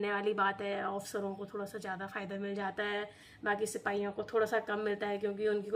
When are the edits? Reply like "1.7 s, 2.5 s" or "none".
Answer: none